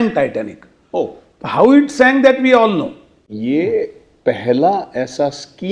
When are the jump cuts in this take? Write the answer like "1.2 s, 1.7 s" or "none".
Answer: 3.2 s